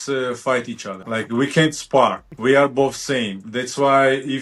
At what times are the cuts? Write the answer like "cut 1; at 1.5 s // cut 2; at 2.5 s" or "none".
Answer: cut 1; at 0.9 s // cut 2; at 2.3 s